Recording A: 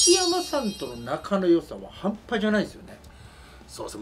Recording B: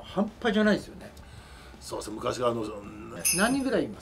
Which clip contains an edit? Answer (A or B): B